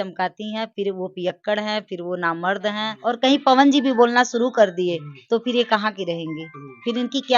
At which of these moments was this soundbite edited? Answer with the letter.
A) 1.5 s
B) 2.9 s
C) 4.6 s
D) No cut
B